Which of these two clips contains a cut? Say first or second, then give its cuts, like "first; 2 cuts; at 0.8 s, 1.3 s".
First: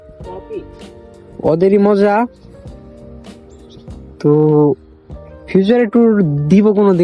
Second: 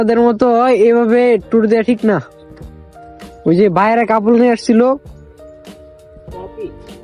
first; 2 cuts; at 2.3 s, 4.2 s